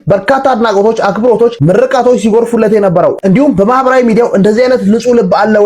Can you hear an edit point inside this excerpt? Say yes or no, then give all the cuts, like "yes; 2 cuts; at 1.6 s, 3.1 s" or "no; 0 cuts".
no; 0 cuts